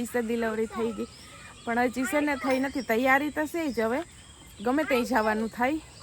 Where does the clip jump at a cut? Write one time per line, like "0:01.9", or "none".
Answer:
none